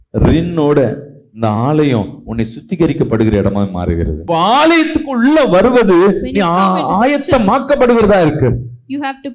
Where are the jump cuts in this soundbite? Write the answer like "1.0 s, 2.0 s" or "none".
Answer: 4.1 s